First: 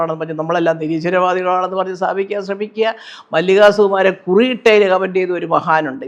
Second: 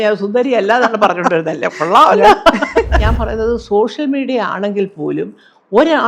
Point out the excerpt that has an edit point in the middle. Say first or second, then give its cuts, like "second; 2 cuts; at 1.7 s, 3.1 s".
second; 1 cut; at 3.0 s